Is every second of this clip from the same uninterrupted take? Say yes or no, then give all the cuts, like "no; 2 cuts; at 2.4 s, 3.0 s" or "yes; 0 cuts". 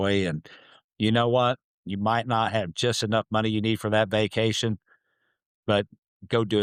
yes; 0 cuts